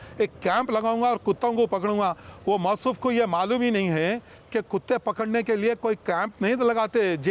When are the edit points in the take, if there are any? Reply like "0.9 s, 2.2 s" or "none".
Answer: none